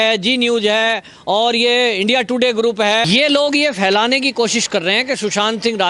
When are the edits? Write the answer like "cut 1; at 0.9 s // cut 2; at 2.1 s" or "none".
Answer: cut 1; at 3.1 s